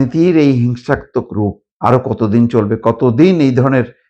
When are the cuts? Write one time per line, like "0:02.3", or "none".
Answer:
0:01.6